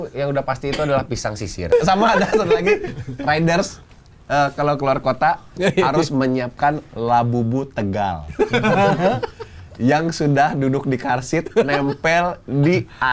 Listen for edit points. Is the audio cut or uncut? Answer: cut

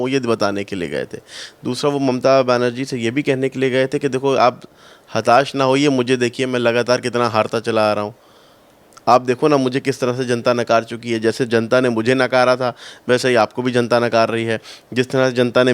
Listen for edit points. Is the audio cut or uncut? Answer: uncut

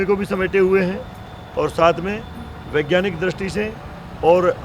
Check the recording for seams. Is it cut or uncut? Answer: uncut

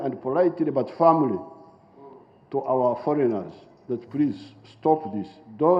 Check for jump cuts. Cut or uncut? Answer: uncut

